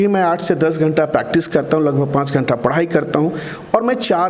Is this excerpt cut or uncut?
uncut